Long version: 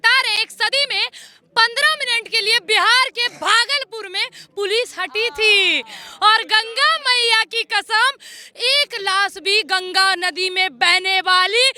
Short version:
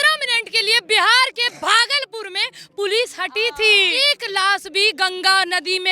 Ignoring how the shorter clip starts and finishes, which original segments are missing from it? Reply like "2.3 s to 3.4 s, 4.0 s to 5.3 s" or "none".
5.7 s to 8.6 s

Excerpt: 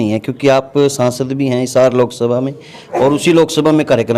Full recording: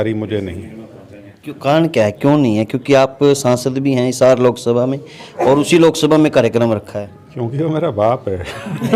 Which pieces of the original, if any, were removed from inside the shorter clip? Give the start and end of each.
none

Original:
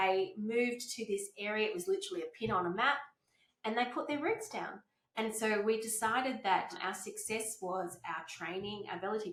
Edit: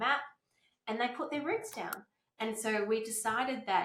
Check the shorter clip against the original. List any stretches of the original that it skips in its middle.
none

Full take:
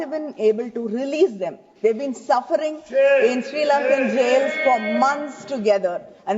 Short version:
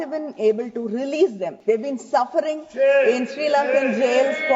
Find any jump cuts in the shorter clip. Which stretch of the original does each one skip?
1.5 s to 1.7 s

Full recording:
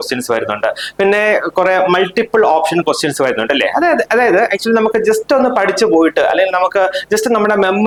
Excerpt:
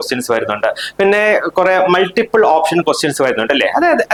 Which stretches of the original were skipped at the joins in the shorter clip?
none

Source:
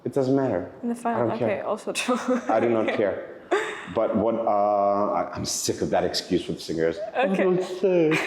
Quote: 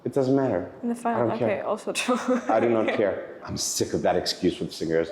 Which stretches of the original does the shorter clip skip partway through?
3.4 s to 5.3 s

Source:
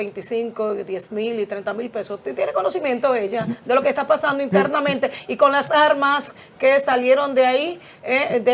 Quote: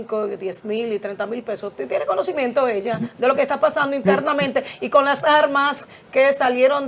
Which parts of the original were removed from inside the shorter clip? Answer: none

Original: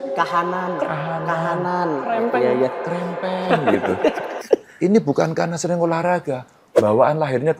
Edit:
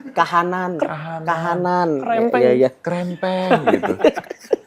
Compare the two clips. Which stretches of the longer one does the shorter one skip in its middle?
none

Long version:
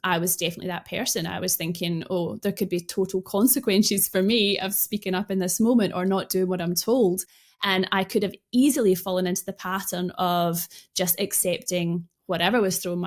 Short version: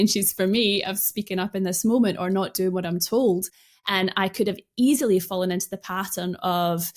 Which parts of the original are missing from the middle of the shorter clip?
none

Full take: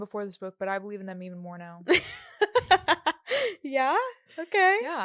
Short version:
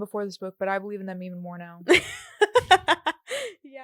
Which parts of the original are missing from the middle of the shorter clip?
none

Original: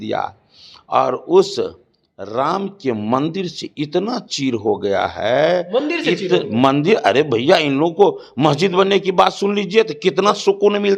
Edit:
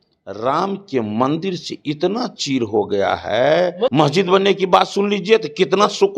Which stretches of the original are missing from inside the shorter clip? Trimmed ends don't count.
5.8 s to 8.4 s

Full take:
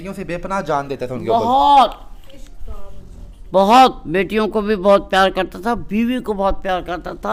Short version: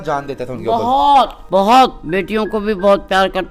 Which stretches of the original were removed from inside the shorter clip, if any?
2.0 s to 3.4 s

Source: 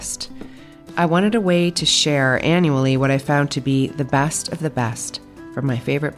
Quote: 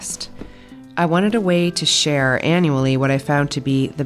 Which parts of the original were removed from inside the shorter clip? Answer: none

